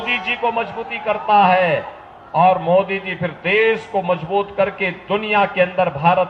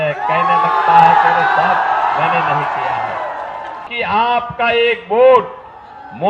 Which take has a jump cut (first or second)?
second